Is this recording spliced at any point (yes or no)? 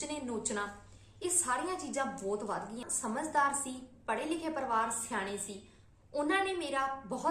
yes